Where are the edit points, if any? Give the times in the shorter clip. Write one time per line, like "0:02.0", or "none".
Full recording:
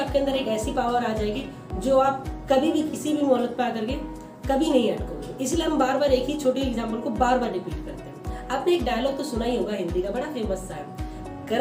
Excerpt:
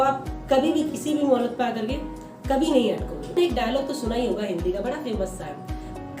0:03.3